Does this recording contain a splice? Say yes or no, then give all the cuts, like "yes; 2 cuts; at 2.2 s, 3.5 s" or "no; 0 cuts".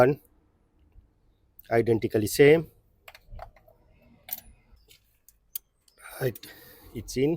yes; 1 cut; at 4.7 s